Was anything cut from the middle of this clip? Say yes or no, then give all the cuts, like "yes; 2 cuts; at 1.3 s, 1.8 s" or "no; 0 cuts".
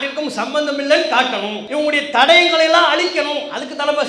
yes; 1 cut; at 1.6 s